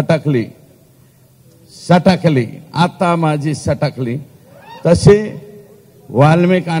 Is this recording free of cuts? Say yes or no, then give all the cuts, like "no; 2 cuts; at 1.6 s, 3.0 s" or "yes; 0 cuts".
yes; 0 cuts